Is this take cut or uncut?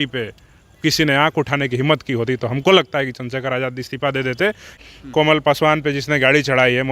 cut